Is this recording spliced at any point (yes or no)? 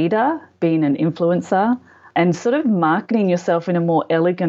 yes